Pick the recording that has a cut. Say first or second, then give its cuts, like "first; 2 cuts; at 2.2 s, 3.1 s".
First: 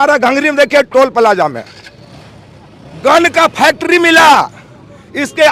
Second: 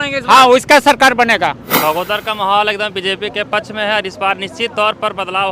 second; 1 cut; at 1.7 s